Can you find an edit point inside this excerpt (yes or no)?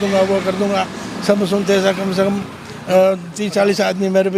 no